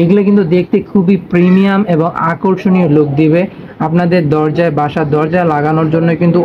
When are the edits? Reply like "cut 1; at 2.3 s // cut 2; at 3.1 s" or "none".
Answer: none

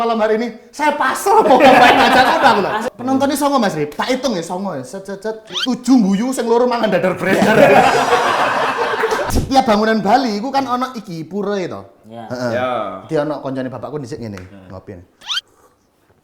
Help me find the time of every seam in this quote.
cut 1; at 2.9 s // cut 2; at 5.5 s // cut 3; at 9.3 s

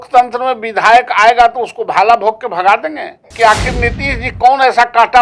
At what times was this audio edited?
cut 1; at 3.3 s

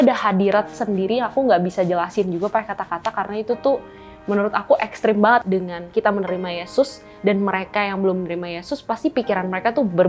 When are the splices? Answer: cut 1; at 5.4 s

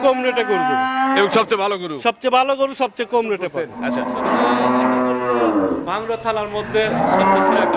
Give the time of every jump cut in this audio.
cut 1; at 3.7 s

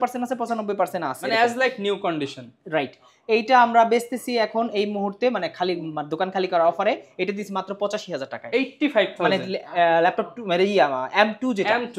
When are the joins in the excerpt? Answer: none

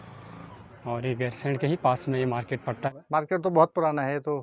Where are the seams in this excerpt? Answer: cut 1; at 2.9 s

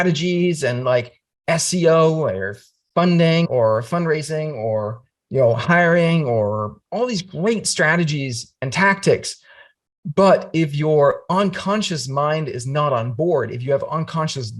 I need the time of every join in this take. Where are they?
cut 1; at 3.5 s // cut 2; at 6.7 s

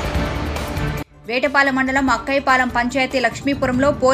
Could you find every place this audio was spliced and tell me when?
none

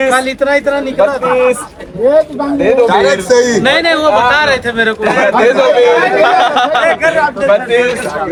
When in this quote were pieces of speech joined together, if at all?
none

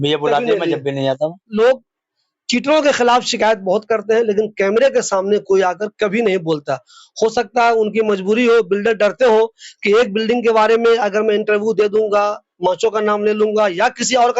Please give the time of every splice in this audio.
cut 1; at 1.5 s

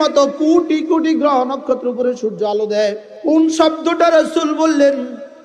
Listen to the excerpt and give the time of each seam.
cut 1; at 3.3 s

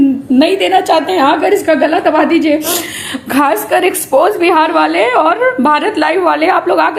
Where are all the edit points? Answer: none

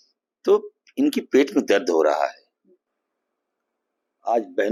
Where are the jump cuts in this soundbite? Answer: none

